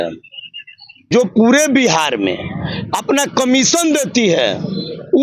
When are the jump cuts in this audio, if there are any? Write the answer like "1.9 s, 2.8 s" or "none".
1.1 s